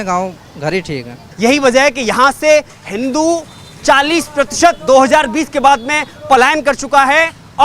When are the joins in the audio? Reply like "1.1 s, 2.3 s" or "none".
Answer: 1.2 s